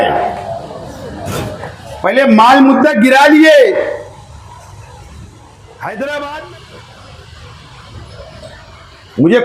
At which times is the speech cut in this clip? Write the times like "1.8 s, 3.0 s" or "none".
6.4 s